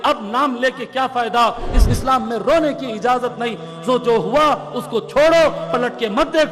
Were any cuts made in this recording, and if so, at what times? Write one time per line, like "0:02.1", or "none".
0:01.8